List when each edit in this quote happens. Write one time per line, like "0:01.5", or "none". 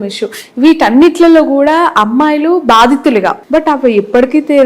0:03.4